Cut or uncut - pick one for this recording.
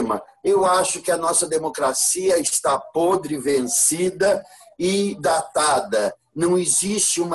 uncut